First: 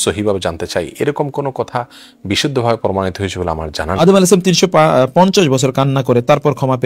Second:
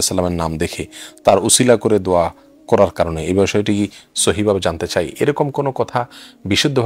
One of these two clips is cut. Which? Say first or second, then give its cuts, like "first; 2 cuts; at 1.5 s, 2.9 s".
first; 1 cut; at 4.0 s